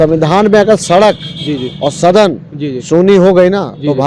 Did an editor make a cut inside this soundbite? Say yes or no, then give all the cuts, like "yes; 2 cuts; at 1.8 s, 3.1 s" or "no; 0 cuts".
no; 0 cuts